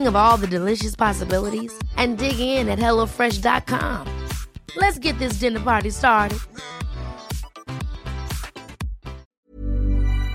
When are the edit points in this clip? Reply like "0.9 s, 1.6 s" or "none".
9.2 s